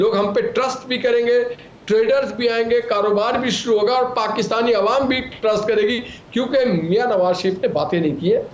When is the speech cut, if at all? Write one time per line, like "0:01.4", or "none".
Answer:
none